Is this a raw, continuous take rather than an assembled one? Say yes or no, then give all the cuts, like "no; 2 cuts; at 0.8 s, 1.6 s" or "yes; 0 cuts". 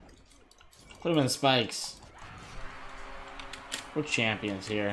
yes; 0 cuts